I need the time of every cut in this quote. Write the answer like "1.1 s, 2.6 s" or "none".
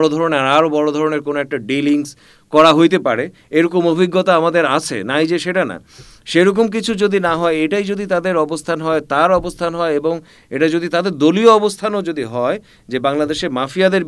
none